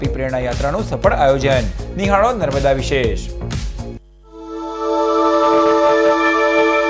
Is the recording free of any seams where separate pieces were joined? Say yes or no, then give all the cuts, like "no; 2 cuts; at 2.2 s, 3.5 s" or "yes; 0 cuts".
no; 1 cut; at 4.1 s